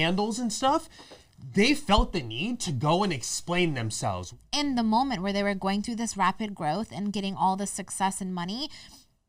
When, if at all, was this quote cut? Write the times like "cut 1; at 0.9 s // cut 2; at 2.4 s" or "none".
cut 1; at 4.3 s